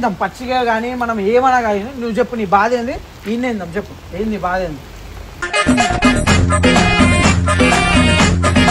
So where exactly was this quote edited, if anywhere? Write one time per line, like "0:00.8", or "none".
none